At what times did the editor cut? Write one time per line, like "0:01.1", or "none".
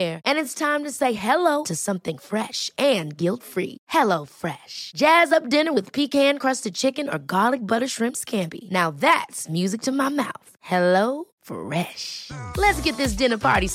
none